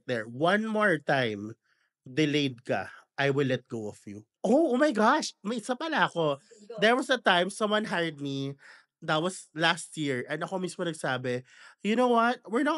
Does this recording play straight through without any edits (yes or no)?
no